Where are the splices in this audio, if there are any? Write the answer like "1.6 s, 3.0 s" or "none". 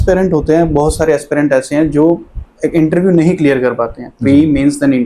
none